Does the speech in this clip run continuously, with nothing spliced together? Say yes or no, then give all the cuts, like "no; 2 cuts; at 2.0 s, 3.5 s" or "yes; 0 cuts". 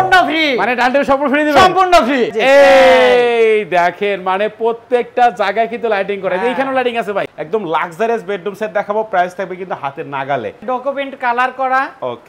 no; 3 cuts; at 2.3 s, 7.3 s, 10.6 s